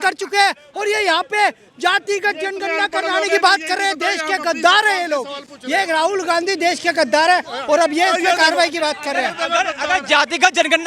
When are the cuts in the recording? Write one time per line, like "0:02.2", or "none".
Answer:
none